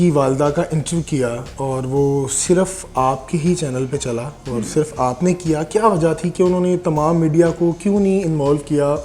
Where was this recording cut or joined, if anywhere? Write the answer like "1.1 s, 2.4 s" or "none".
none